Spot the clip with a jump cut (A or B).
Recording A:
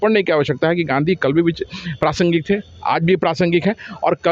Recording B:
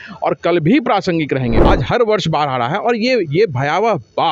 B